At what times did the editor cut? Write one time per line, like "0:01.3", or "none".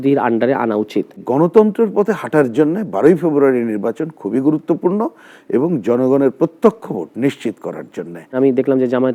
0:01.2
0:08.3